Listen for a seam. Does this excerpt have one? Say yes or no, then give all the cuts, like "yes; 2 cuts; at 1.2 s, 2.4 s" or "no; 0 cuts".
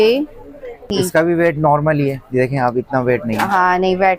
yes; 1 cut; at 1.0 s